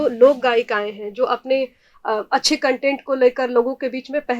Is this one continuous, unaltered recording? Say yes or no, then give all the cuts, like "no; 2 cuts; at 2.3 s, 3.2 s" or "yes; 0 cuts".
yes; 0 cuts